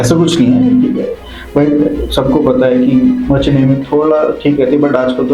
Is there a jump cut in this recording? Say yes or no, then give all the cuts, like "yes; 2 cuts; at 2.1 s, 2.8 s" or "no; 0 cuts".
no; 0 cuts